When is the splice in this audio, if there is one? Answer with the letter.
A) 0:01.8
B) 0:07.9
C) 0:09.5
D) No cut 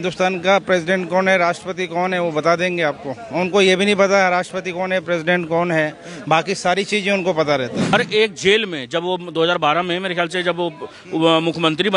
B